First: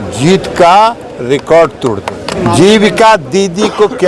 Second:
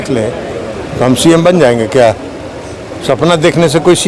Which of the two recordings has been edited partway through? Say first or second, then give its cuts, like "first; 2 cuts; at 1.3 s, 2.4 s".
first; 1 cut; at 2.3 s